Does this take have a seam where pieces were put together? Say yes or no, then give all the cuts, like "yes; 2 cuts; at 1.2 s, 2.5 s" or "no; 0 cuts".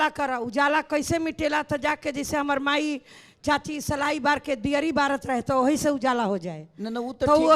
no; 0 cuts